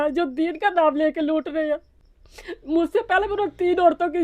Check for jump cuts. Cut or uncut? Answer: uncut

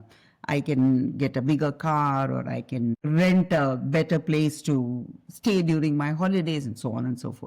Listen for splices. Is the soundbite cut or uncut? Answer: cut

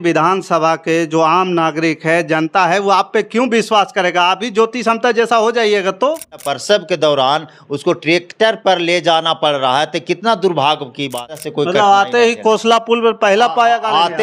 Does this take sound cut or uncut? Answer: cut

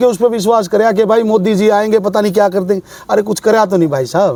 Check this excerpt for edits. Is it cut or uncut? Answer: uncut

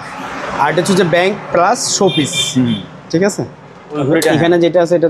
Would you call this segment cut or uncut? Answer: cut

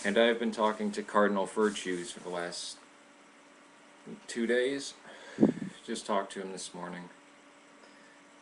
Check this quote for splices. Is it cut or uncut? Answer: uncut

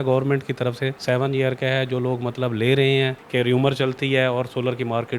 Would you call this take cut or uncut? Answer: cut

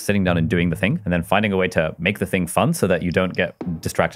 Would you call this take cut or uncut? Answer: cut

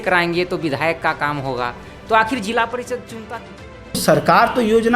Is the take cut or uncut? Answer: cut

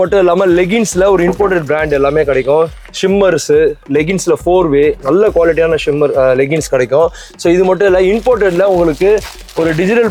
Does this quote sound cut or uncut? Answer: uncut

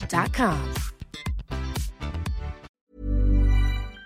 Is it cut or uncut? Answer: cut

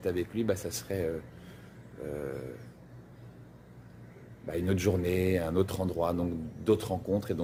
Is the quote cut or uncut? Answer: uncut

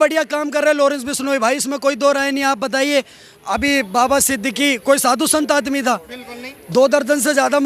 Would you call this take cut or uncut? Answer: uncut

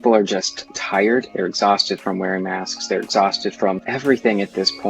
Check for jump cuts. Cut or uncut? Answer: cut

